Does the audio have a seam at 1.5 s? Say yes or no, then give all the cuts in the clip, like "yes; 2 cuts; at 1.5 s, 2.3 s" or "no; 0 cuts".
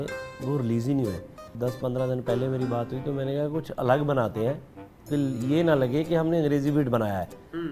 yes; 1 cut; at 1.5 s